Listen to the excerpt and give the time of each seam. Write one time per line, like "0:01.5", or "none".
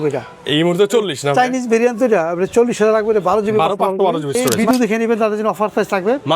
0:04.5